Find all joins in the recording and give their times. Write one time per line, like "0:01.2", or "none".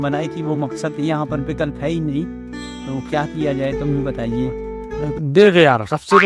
none